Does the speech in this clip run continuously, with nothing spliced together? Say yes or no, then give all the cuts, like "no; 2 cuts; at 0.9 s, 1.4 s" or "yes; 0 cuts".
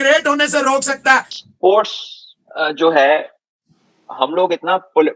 no; 1 cut; at 1.4 s